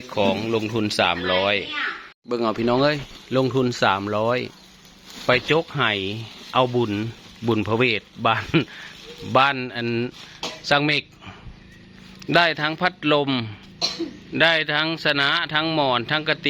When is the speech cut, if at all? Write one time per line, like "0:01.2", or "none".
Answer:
0:02.2